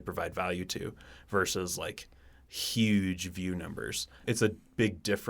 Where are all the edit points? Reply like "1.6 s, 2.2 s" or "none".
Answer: 4.2 s